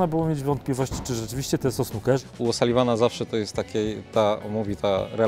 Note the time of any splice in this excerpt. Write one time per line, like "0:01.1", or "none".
0:02.2